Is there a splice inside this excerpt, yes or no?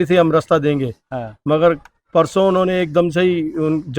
no